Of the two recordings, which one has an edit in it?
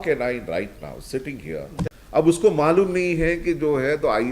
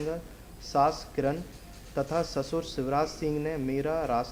first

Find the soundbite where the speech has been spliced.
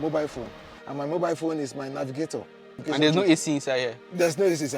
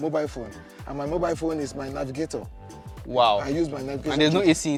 first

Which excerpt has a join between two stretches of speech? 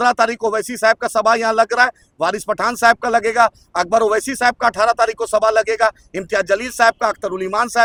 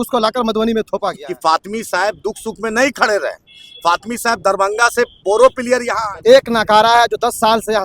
second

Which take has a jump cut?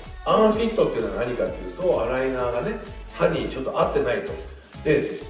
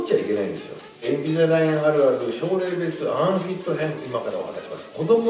second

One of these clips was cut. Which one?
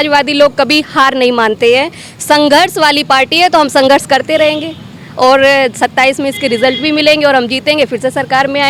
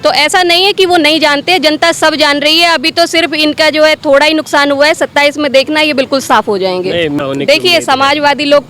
second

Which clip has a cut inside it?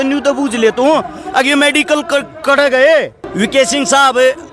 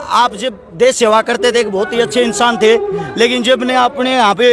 first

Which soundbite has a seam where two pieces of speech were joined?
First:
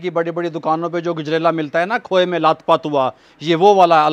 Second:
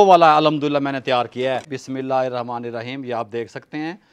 second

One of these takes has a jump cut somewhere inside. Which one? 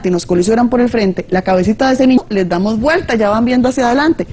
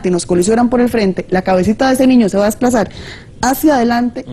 second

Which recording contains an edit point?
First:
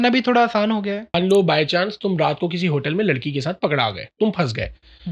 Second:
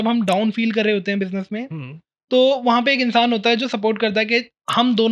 first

